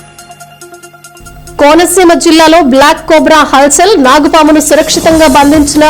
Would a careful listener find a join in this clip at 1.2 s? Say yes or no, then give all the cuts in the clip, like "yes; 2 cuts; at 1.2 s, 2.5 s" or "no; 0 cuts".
yes; 1 cut; at 1.2 s